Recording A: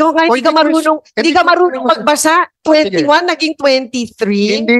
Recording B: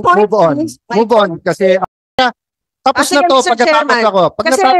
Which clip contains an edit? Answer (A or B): B